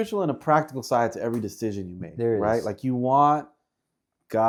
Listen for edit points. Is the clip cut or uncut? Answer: uncut